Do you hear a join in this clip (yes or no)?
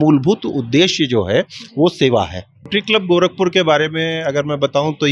yes